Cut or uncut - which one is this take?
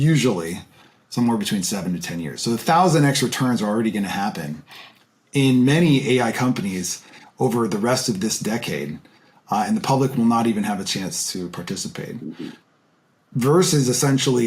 uncut